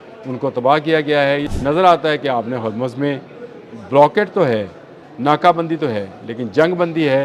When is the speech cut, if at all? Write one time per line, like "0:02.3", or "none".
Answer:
0:01.5